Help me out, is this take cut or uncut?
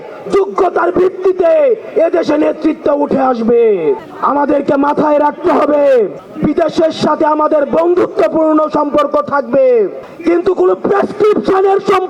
cut